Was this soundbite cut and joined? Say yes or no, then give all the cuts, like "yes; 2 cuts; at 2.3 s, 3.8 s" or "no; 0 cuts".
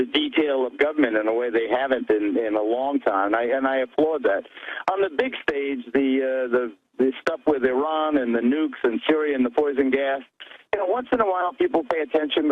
no; 0 cuts